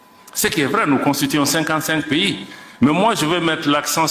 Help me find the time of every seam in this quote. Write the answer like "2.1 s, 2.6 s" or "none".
none

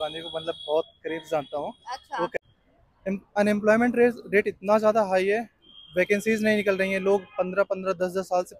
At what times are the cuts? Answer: 2.3 s

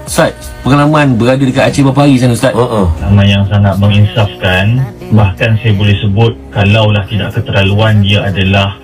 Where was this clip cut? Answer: 3.0 s

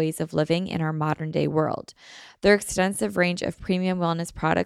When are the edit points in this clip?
none

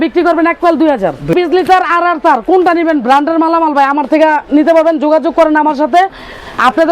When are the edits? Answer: 1.3 s

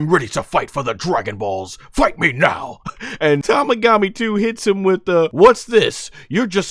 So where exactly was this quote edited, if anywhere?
3.4 s, 5.3 s

